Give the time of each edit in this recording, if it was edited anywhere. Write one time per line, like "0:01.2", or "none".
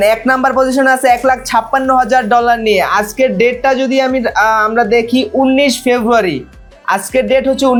none